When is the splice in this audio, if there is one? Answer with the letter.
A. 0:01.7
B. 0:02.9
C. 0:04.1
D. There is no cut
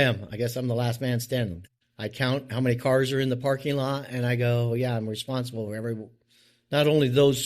A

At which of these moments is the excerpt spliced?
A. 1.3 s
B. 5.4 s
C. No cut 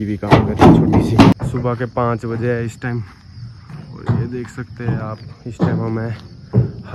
A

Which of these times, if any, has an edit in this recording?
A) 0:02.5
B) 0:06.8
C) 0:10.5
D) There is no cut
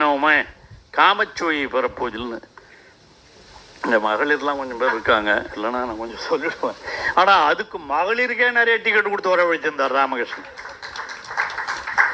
D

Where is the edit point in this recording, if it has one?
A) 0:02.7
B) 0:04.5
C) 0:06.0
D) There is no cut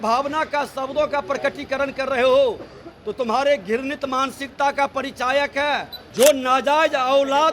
C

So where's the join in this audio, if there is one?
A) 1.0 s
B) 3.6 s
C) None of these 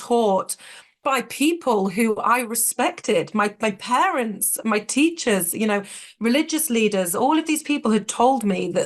A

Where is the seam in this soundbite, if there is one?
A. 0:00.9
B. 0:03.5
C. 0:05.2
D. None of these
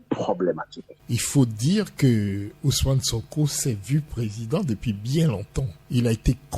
A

